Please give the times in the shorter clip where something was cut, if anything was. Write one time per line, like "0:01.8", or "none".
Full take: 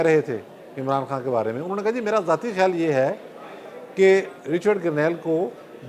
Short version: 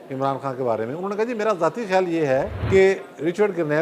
0:02.6